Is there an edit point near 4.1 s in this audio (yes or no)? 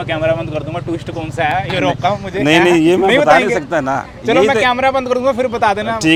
no